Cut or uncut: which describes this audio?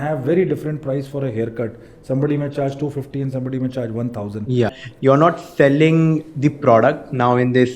cut